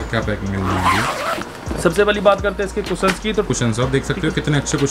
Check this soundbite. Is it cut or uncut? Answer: cut